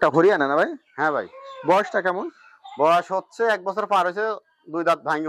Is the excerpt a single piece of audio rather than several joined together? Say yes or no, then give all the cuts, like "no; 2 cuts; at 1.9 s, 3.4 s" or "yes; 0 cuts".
yes; 0 cuts